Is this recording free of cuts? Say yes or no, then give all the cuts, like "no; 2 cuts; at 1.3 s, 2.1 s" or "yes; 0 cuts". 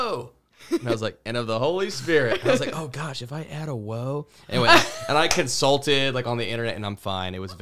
yes; 0 cuts